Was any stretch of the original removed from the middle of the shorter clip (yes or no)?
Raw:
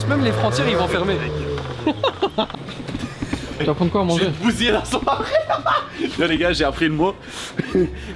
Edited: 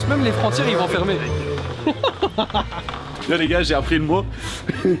yes